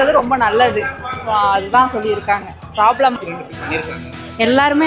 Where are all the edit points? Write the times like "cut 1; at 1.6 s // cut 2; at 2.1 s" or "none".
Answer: cut 1; at 3.1 s